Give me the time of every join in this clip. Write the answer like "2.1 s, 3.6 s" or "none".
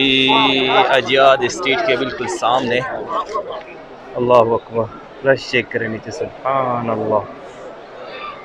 3.6 s